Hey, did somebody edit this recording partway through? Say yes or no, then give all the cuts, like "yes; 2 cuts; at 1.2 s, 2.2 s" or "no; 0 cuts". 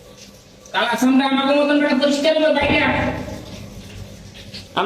no; 0 cuts